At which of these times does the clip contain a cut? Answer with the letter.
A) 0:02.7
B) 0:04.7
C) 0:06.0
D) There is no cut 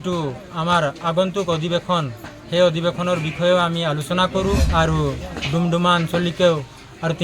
B